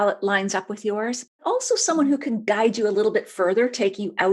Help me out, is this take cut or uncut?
uncut